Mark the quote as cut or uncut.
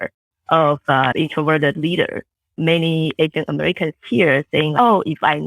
cut